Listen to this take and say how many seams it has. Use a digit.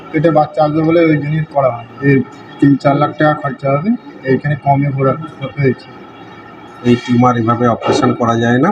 2